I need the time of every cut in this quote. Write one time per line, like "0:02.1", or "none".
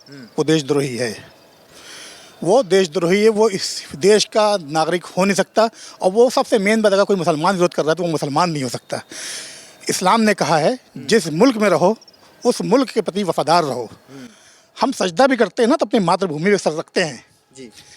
none